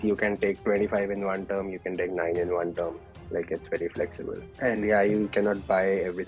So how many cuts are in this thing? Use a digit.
1